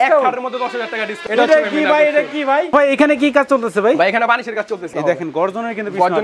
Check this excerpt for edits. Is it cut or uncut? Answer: cut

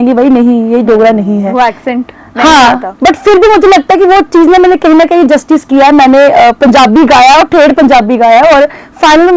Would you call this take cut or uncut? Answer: uncut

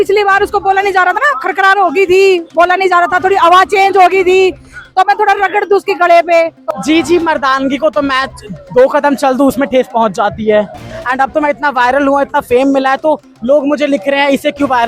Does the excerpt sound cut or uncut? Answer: cut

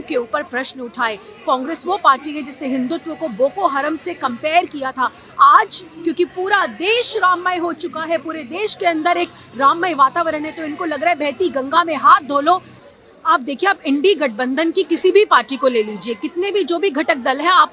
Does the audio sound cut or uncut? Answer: cut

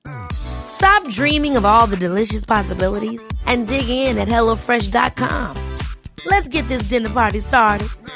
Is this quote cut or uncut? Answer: uncut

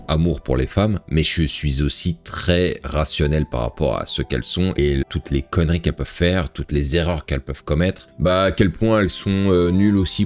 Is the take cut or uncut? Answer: cut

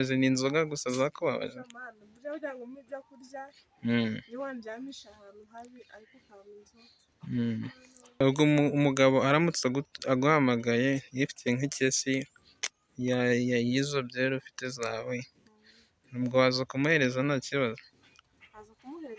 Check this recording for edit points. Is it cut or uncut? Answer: cut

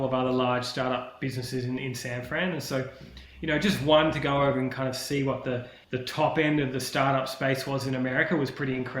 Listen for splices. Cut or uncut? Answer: cut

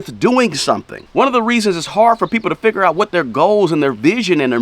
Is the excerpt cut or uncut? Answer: cut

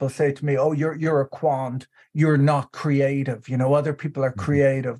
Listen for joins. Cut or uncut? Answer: uncut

